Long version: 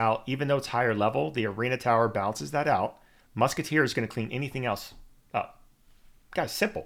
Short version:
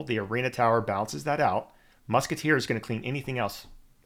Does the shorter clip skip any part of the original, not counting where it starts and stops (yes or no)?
no